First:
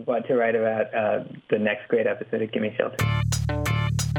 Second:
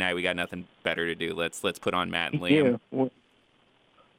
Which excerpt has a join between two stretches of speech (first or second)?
first